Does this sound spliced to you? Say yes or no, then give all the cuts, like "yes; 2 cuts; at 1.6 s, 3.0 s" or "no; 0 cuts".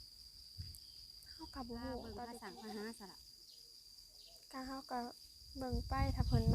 yes; 1 cut; at 2.2 s